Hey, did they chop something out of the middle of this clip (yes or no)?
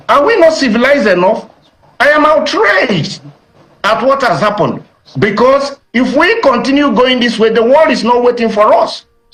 no